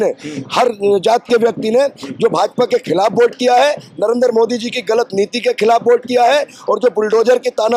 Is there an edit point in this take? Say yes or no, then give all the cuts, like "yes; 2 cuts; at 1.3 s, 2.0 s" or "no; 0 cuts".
no; 0 cuts